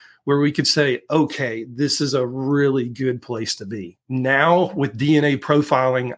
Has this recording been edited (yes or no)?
yes